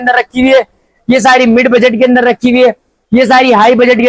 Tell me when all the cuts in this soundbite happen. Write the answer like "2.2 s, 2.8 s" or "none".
none